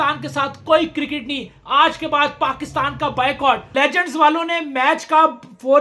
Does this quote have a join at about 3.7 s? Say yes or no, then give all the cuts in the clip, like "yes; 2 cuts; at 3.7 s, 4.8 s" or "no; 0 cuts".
yes; 1 cut; at 3.7 s